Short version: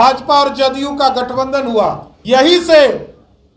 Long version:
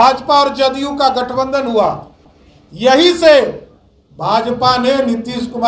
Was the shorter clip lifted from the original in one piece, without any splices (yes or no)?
no